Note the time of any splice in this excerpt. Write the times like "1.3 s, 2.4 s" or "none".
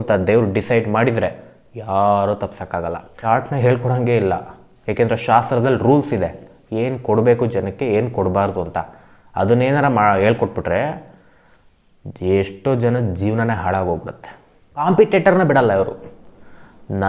3.1 s, 14.8 s